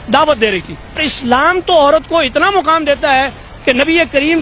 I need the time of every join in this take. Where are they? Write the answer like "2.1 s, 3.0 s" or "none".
1.1 s